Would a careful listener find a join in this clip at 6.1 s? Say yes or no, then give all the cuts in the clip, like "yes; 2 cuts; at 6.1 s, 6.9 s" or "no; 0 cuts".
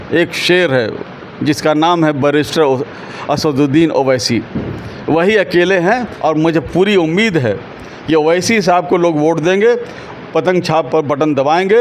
yes; 1 cut; at 6.1 s